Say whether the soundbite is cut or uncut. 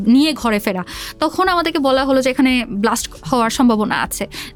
uncut